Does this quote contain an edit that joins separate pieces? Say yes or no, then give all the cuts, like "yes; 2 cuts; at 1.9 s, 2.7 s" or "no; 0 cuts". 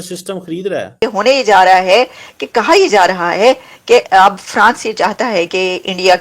yes; 1 cut; at 0.9 s